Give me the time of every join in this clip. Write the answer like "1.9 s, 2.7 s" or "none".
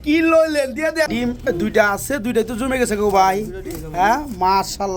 1.1 s